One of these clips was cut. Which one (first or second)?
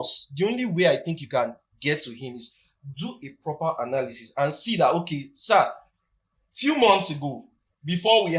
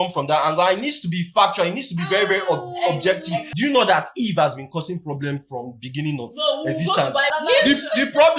second